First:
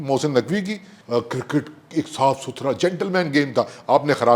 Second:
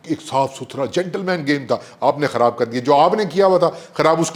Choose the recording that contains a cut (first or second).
first